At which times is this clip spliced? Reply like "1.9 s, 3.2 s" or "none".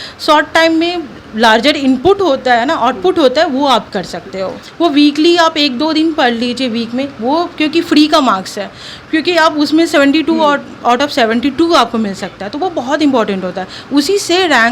4.6 s